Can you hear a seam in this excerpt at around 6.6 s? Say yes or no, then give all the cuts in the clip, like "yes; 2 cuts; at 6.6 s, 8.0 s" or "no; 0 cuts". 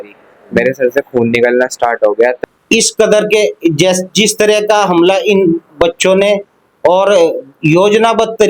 no; 1 cut; at 2.4 s